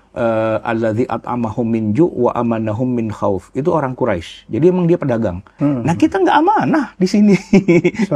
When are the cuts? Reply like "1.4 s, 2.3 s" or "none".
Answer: 5.5 s